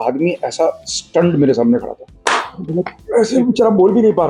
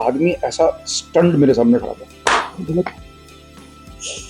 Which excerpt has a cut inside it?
first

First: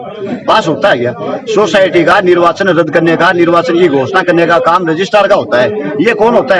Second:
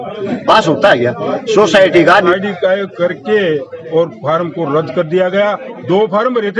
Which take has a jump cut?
second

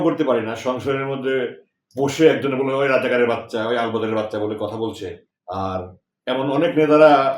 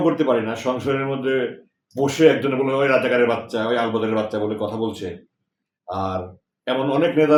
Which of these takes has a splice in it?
first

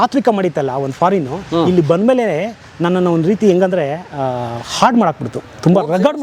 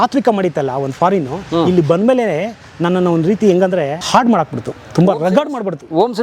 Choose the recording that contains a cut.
second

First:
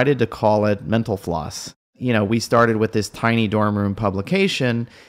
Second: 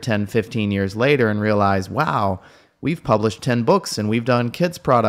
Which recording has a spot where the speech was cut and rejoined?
first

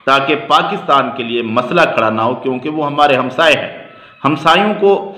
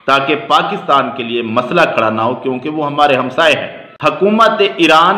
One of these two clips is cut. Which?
second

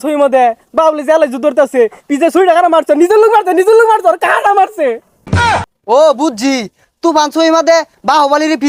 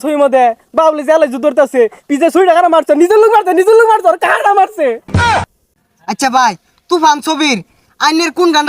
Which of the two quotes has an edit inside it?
second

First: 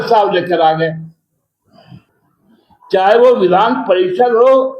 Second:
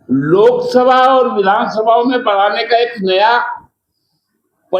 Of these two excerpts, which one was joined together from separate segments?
first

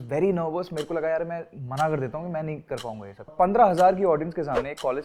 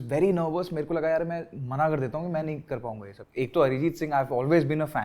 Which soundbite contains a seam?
first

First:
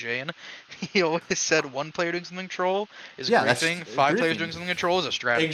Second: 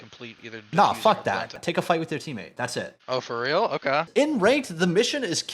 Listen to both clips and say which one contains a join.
second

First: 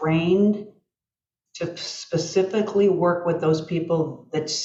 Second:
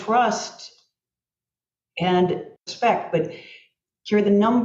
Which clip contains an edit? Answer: second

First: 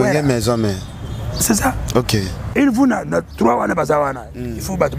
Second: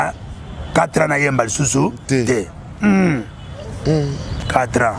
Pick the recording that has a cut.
first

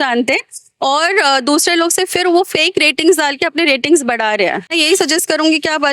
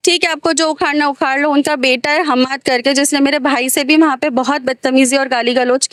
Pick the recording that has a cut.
first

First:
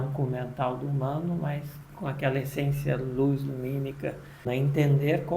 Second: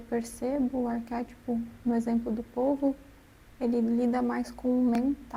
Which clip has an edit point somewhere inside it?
first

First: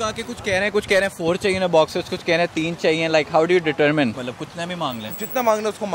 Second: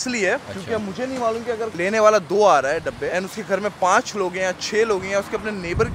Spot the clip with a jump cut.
second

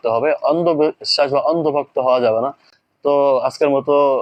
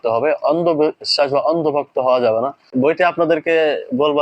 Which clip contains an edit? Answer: second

